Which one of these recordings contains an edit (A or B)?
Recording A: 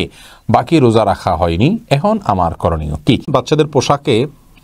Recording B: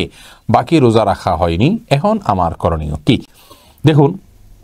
A